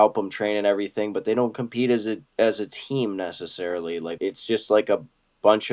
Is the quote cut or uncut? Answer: uncut